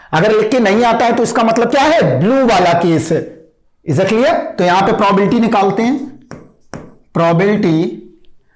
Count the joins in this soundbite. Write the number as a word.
one